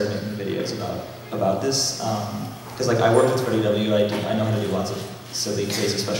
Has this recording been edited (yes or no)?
yes